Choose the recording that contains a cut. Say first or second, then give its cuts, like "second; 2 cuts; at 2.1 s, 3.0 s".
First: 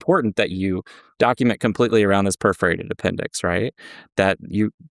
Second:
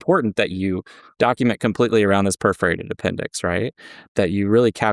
second; 1 cut; at 4.0 s